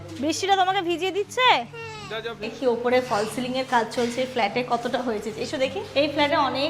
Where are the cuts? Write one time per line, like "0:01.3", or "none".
0:02.5
0:05.8